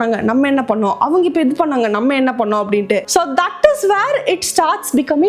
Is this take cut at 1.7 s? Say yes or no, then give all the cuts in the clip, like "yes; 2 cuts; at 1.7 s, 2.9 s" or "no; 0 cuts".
no; 0 cuts